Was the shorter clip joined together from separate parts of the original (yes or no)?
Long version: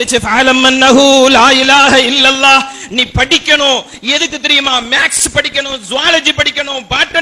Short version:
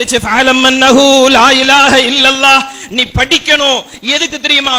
no